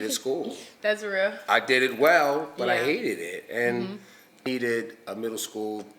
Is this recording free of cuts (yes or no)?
no